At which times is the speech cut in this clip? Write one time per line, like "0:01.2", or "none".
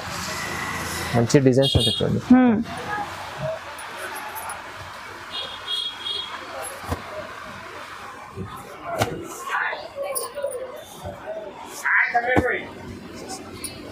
none